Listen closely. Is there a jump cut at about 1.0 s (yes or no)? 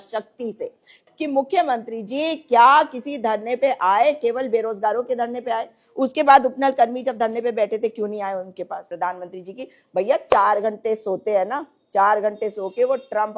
yes